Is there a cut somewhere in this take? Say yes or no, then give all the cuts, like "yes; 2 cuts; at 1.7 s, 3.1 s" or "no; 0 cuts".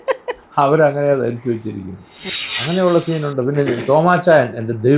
yes; 1 cut; at 2.2 s